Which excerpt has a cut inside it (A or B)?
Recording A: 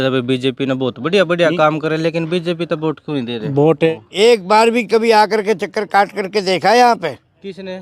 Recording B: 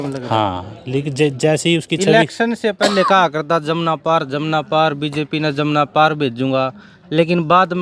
A